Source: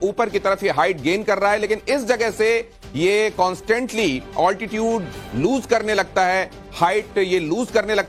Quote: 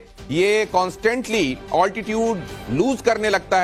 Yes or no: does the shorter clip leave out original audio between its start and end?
no